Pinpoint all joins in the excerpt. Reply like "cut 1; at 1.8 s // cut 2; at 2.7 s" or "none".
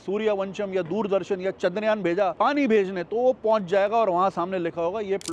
none